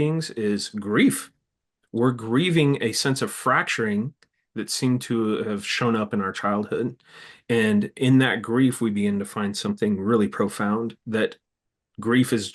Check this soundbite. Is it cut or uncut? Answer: uncut